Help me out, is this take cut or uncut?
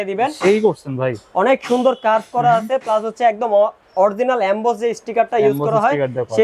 uncut